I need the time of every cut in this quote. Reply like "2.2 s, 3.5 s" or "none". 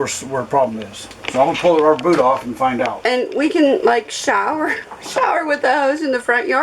3.0 s